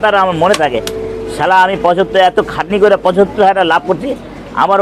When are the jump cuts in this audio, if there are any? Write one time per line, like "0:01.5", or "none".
none